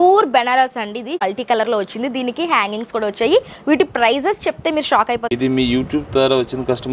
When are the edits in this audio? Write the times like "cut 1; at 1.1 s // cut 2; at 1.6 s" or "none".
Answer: cut 1; at 1.2 s // cut 2; at 5.3 s